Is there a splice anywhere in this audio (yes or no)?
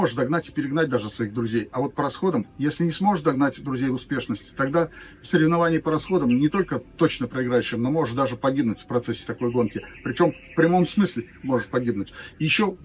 no